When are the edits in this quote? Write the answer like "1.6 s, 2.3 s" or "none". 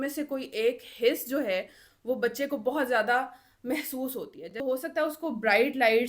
4.4 s